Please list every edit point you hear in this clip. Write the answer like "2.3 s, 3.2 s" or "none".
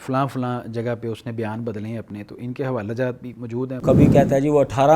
3.8 s